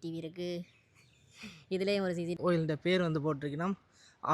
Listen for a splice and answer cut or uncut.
cut